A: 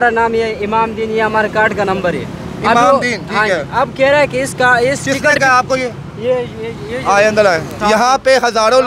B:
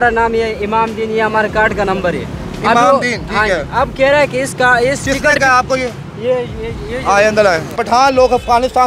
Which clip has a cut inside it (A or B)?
B